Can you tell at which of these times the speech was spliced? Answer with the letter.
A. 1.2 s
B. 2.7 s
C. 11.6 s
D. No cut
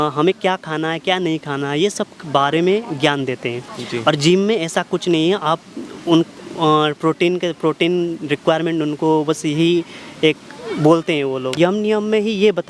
C